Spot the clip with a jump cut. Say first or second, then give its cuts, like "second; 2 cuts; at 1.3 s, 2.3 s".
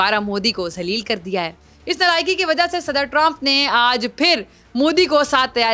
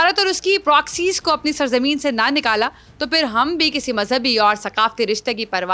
first; 1 cut; at 1.7 s